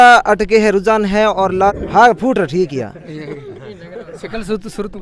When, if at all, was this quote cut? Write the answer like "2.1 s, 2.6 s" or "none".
1.7 s